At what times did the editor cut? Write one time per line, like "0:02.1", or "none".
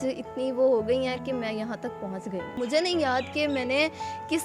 0:02.6

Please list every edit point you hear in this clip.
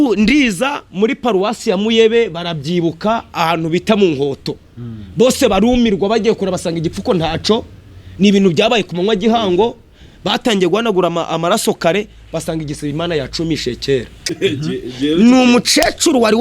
0:14.2

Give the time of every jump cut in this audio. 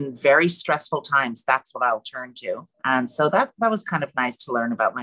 0:02.7

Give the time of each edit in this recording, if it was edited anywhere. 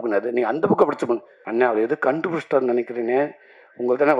0:01.4

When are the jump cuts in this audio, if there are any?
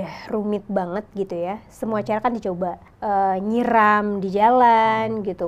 0:02.9

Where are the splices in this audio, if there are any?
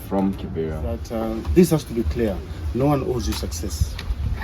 0:01.1

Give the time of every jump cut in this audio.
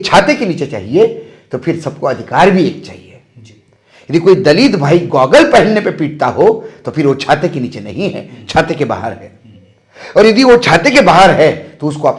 none

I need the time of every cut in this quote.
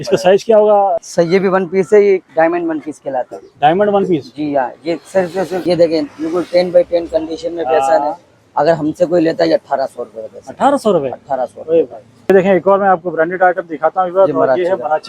0:01.0
0:05.6
0:12.3

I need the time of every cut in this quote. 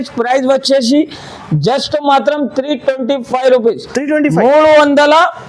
none

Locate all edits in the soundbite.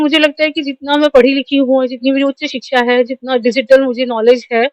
none

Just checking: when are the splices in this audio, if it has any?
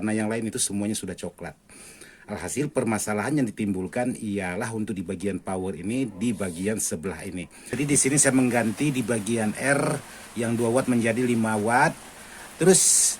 0:07.8

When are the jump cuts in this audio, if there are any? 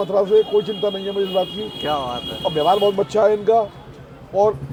none

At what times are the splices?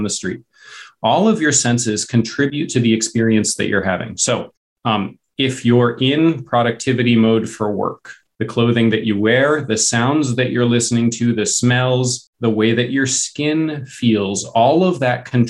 0:02.5

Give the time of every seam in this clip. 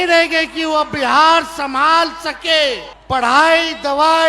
0:02.9

